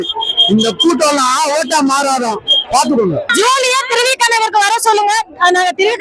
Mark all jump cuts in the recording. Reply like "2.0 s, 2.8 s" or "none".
3.3 s

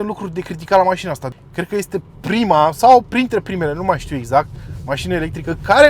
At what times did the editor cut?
1.3 s

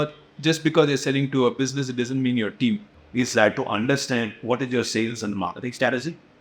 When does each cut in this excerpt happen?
2.9 s

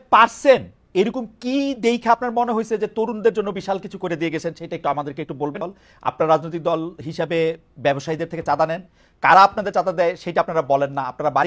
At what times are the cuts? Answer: 5.6 s

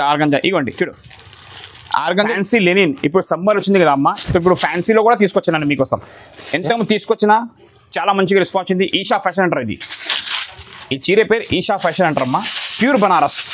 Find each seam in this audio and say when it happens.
2.3 s

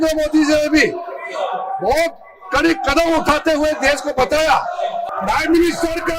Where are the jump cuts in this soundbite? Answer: 5.1 s

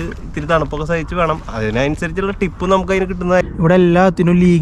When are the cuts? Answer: 3.5 s

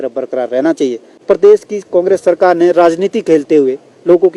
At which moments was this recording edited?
1.2 s

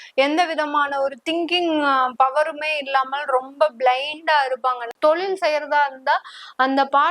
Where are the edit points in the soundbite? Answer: 4.9 s

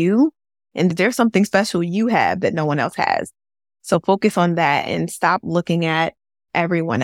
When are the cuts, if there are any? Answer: 0.9 s

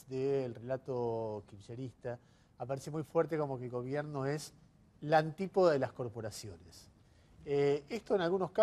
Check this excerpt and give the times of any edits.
1.2 s

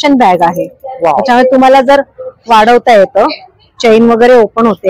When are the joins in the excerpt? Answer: none

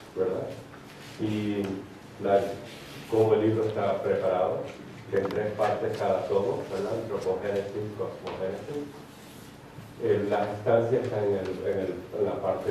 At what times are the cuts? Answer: 8.0 s

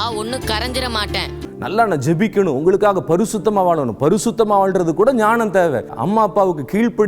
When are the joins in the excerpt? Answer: 1.5 s, 6.0 s

